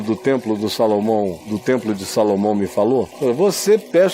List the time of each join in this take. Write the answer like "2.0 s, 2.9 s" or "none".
1.5 s, 3.1 s